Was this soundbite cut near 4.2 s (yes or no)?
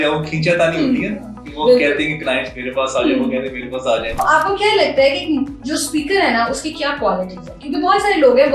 yes